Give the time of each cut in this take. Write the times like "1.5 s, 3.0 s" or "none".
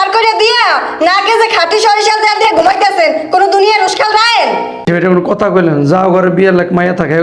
4.9 s